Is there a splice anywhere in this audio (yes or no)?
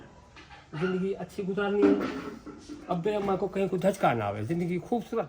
no